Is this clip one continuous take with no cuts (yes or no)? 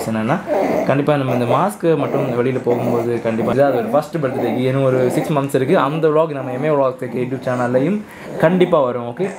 no